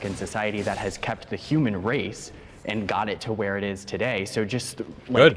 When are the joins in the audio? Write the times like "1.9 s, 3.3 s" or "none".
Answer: none